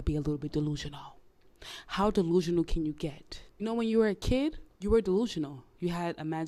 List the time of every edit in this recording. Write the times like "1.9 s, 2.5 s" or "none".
none